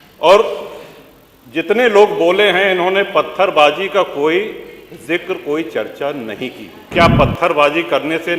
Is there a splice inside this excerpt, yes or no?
yes